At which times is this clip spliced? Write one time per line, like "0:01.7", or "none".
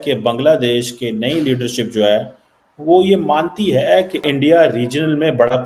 0:04.2